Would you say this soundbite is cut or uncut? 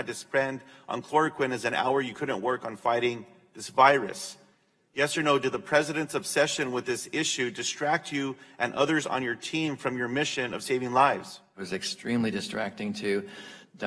cut